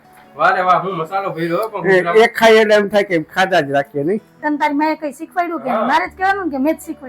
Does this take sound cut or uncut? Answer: cut